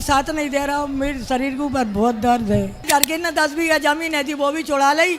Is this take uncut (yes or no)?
no